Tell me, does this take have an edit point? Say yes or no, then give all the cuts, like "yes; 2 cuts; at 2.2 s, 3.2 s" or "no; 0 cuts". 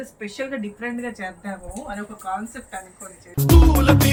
no; 0 cuts